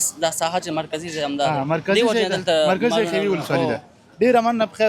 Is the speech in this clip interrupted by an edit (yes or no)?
no